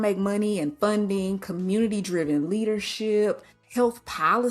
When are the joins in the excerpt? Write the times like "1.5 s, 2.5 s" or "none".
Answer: 3.5 s